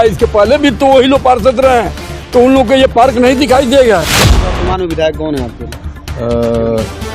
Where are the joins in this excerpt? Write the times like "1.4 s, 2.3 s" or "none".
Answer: 4.1 s